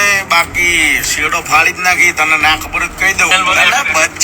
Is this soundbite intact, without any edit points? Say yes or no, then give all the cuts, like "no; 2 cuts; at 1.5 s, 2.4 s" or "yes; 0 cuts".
no; 1 cut; at 3.3 s